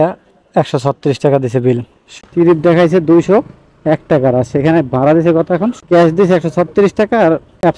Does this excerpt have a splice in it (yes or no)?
yes